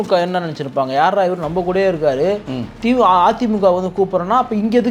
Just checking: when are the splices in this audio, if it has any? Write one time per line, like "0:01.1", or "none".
none

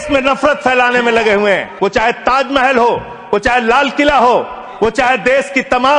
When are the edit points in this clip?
0:01.7

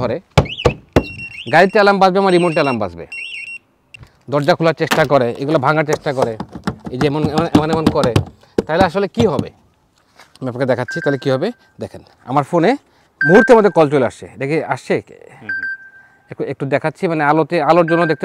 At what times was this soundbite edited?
0:04.1

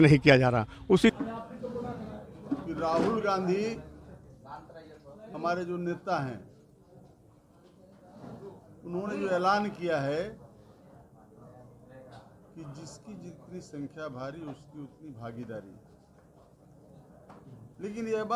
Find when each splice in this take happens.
0:01.1

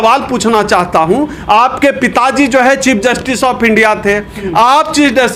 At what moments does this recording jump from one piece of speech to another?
none

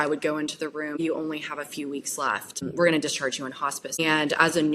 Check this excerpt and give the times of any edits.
0:01.0
0:02.5
0:04.0

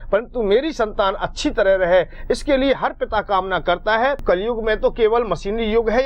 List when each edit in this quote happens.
0:04.2

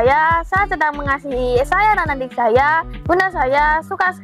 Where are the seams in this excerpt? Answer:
0:02.9

